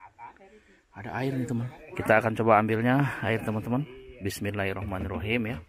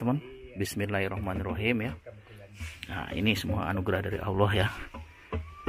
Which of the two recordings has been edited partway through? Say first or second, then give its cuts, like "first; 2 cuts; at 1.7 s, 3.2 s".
first; 1 cut; at 1.8 s